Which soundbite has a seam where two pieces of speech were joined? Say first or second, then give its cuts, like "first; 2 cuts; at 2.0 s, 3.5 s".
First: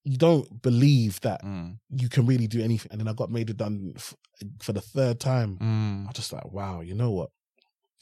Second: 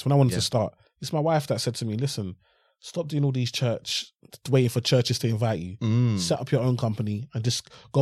first; 1 cut; at 2.8 s